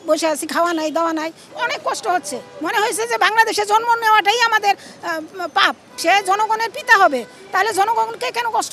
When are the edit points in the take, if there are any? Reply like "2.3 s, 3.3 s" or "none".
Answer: 1.5 s, 6.0 s